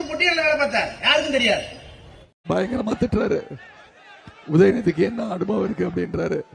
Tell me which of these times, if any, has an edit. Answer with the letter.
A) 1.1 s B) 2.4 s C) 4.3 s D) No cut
B